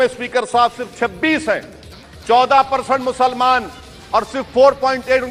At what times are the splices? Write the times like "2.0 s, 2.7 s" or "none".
none